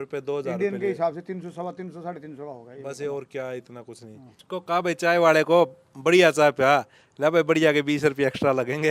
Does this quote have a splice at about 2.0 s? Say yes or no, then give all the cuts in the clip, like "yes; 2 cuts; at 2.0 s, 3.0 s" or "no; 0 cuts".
no; 1 cut; at 4.3 s